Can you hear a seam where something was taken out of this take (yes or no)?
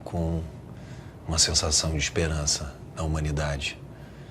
no